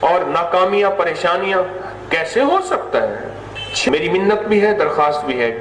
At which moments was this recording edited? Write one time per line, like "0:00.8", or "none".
0:03.9